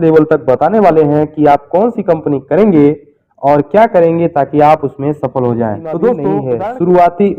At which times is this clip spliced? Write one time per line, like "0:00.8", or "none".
0:06.5